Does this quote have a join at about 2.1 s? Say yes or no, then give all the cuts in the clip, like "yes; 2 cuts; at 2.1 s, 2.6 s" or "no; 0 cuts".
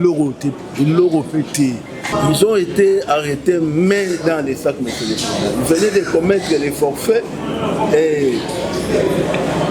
yes; 1 cut; at 2.1 s